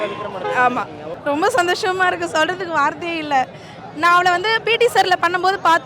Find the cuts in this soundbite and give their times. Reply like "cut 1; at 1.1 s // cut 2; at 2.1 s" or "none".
cut 1; at 1.2 s